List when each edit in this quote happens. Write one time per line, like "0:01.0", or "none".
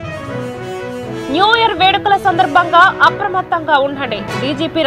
0:01.0